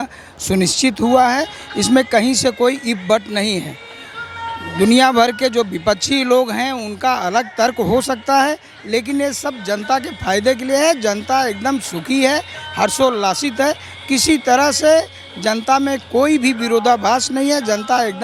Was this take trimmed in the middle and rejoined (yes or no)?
no